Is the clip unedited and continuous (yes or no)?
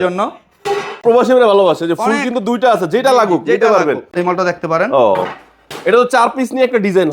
no